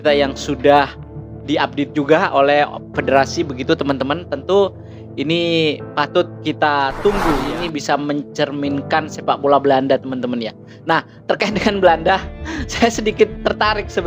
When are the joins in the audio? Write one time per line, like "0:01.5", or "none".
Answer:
0:07.4

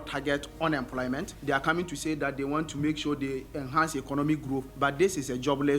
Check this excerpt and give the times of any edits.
0:01.3
0:04.7

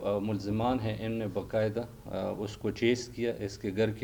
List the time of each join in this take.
none

